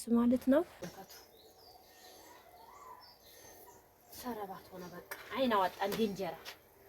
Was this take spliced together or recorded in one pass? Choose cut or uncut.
cut